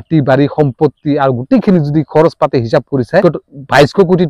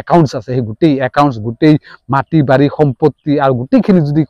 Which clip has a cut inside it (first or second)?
first